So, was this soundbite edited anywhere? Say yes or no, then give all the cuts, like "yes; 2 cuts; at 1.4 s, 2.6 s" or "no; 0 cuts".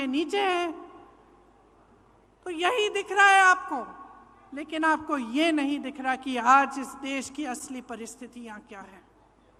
no; 0 cuts